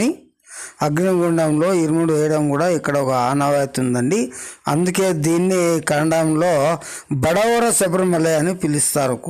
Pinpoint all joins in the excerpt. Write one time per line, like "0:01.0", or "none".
none